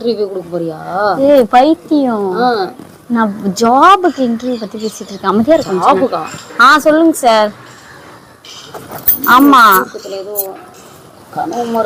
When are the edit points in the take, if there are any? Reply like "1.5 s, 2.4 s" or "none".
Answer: none